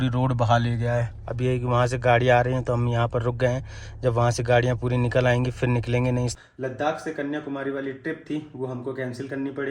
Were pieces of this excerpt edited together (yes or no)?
yes